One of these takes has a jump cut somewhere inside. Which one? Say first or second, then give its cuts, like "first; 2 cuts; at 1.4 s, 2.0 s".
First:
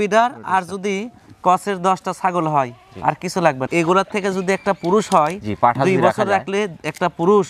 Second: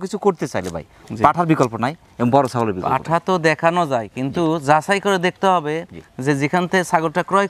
first; 1 cut; at 3.7 s